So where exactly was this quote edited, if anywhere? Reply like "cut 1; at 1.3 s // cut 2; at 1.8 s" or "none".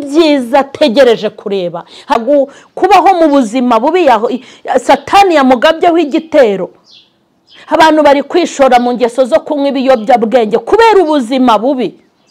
cut 1; at 2.1 s